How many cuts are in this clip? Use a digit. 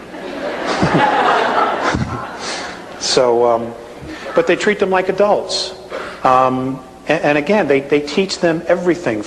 0